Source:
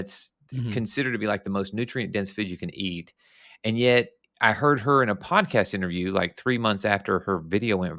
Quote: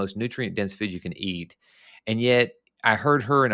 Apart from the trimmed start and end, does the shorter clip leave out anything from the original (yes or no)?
no